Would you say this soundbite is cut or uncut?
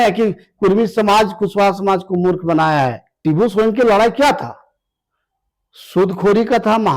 cut